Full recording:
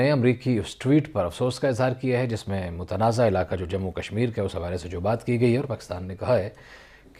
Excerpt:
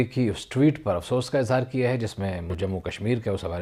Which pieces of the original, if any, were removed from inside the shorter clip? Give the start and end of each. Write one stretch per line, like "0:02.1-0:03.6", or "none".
0:02.8-0:03.6